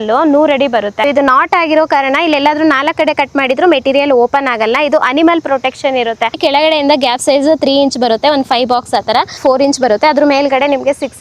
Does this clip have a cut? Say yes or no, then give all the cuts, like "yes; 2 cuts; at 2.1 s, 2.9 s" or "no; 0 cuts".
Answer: yes; 3 cuts; at 1.1 s, 6.4 s, 9.4 s